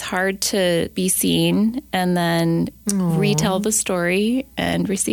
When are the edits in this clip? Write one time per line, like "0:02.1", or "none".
0:00.9